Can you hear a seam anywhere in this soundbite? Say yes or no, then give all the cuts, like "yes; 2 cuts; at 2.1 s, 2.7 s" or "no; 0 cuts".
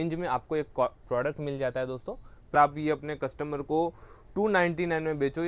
yes; 1 cut; at 2.5 s